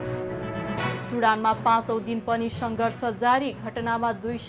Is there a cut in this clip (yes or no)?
yes